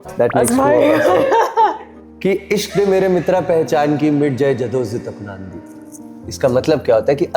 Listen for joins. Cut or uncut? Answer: uncut